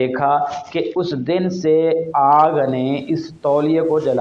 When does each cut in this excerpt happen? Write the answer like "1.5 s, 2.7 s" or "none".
none